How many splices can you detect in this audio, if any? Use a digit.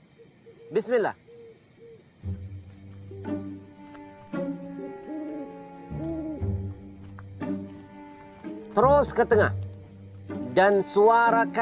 1